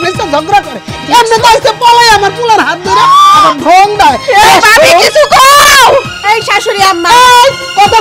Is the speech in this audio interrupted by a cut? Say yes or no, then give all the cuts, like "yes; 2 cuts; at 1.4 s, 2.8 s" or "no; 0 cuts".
no; 0 cuts